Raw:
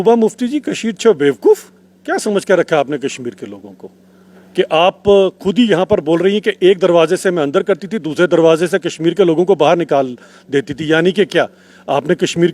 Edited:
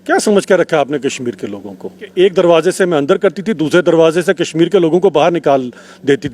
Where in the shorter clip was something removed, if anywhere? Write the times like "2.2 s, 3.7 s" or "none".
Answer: 2.1 s